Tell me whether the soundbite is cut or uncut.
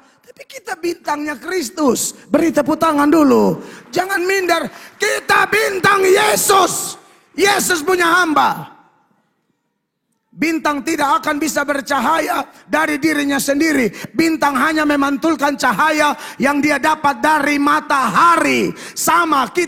uncut